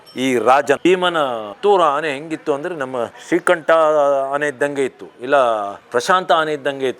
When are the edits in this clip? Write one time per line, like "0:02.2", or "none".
0:01.1
0:03.2